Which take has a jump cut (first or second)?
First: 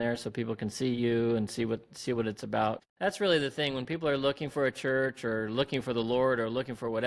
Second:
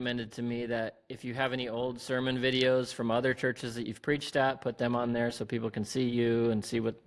first